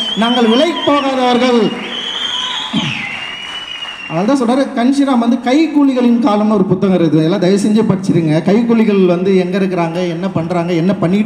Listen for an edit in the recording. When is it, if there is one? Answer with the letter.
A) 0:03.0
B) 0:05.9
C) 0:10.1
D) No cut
D